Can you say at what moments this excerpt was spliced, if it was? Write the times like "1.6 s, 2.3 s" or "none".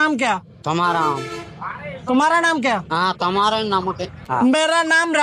4.3 s